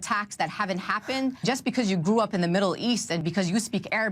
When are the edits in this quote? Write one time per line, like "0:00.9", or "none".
0:01.5
0:03.2